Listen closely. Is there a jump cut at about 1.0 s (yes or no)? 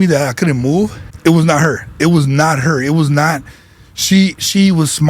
yes